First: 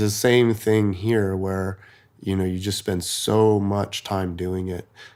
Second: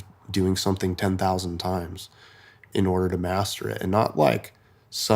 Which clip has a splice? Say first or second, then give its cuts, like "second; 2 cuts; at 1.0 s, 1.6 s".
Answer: second; 1 cut; at 2.7 s